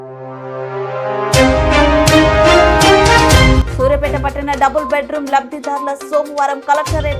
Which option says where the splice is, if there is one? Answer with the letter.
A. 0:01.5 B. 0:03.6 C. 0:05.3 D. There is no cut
B